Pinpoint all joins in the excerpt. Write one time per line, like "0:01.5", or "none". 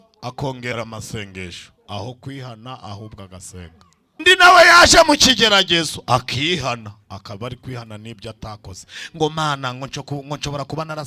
0:04.2

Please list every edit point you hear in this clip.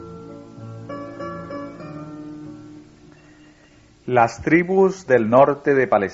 0:02.3

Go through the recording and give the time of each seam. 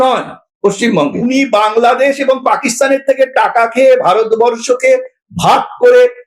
0:01.2

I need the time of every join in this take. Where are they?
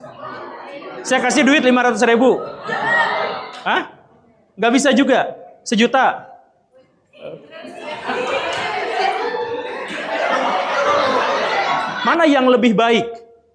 0:11.8

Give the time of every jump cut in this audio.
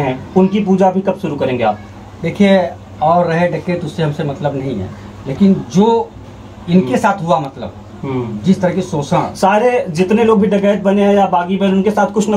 none

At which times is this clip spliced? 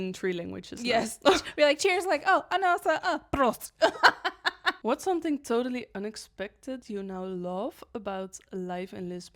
0:04.7

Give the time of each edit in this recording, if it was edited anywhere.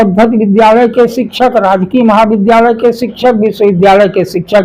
none

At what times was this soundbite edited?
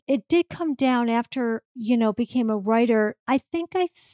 0:01.7
0:03.2

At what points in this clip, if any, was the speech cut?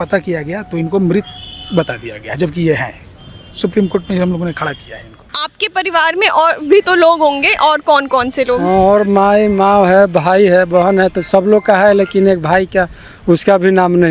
0:05.3

